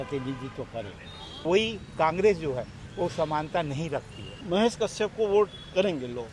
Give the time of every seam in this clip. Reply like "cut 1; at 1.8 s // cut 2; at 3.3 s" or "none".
cut 1; at 1.4 s // cut 2; at 4.4 s